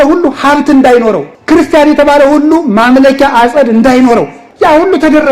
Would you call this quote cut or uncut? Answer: cut